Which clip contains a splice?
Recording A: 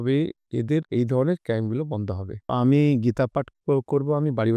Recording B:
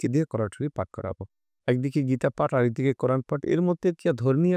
A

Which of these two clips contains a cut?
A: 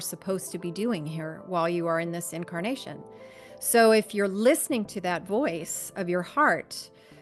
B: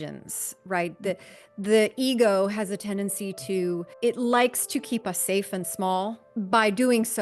B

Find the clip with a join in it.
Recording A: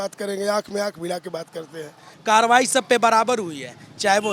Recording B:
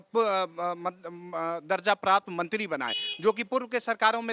A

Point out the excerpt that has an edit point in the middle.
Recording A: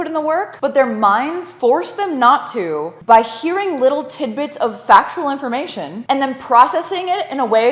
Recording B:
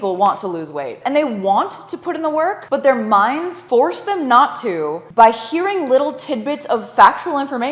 B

